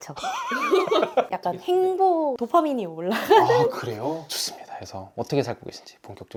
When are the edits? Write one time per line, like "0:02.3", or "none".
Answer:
none